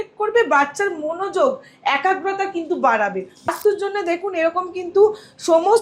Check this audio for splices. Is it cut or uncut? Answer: cut